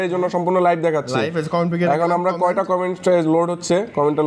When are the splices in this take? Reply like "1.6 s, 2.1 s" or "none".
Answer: none